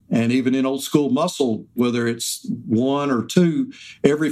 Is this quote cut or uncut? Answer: cut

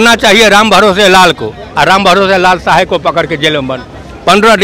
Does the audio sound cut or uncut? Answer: uncut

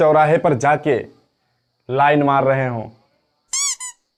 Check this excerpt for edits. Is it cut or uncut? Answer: uncut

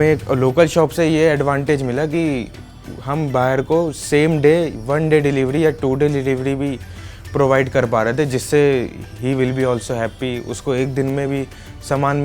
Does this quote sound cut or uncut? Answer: uncut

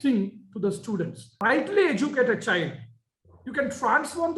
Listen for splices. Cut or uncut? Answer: cut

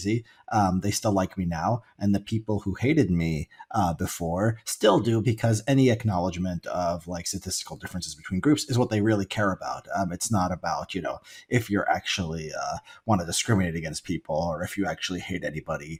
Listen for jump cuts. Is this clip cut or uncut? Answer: uncut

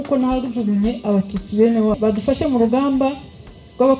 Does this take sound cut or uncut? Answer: cut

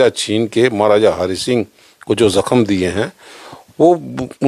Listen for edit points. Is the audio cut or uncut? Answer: uncut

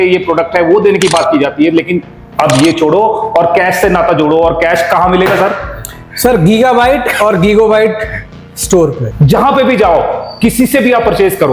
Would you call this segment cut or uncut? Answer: cut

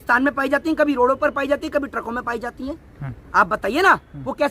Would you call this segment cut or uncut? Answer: uncut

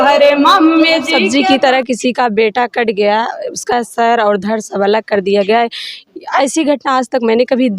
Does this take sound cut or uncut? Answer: cut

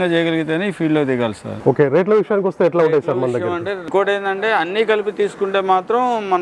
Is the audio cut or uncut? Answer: cut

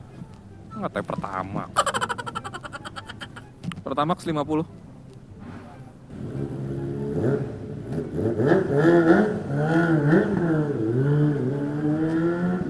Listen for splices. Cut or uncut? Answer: uncut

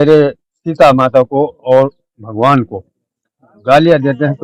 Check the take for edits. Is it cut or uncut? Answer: uncut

